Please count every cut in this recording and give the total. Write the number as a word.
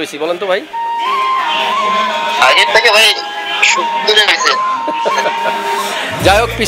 zero